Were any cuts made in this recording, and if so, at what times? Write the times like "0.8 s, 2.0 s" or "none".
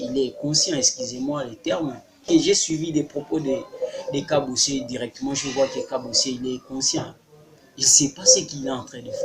2.2 s